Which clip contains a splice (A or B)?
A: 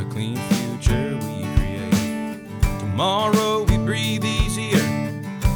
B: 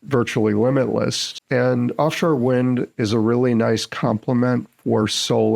B